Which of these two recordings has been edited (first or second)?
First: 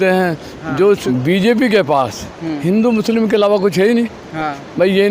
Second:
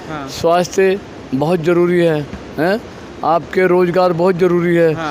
first